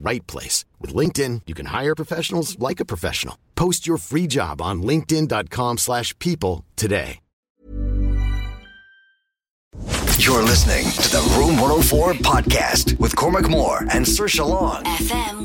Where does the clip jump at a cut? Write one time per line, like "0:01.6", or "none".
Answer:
0:09.6